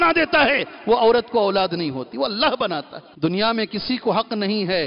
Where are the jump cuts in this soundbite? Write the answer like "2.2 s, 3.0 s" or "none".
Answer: 3.0 s